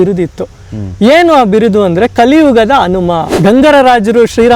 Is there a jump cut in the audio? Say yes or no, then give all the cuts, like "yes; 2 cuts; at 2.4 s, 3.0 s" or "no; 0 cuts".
yes; 1 cut; at 3.3 s